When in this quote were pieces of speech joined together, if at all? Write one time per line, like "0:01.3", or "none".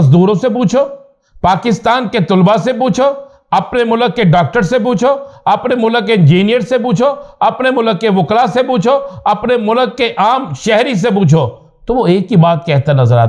none